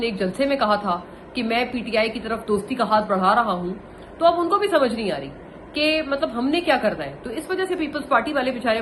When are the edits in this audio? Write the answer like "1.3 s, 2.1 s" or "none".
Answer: none